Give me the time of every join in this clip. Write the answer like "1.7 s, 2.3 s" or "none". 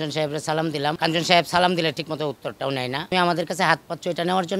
1.0 s, 3.1 s